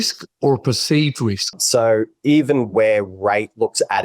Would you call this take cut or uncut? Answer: cut